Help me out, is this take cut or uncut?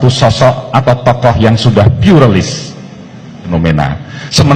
cut